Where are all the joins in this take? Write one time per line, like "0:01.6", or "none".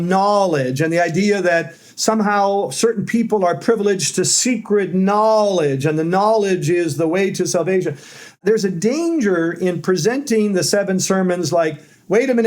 0:08.4